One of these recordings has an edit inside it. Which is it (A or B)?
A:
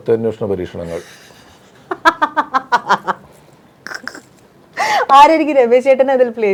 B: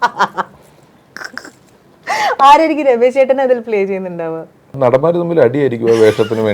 B